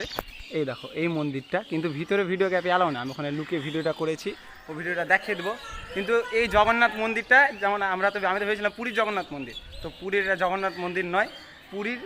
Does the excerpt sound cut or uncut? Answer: uncut